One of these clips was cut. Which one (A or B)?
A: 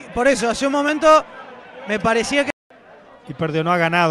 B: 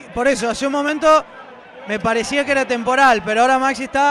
A